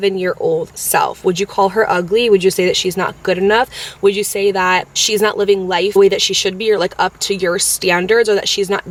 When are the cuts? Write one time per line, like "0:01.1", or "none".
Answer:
none